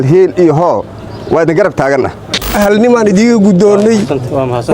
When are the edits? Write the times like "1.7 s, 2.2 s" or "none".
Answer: 2.5 s